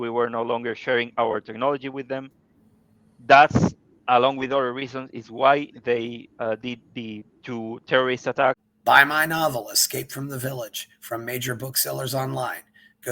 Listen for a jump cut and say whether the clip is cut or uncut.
cut